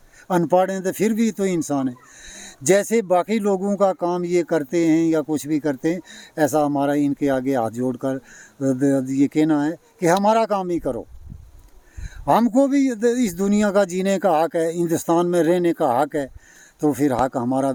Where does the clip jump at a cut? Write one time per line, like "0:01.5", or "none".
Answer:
none